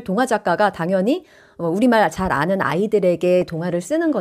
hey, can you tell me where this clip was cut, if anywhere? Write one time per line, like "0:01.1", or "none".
none